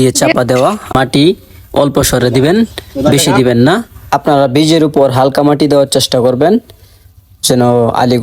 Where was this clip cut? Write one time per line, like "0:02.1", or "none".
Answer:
0:00.9